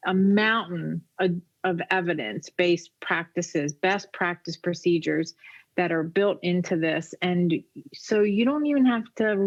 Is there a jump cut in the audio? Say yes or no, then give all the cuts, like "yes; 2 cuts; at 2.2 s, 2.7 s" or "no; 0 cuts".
no; 0 cuts